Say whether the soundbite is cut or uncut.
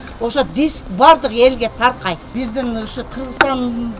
cut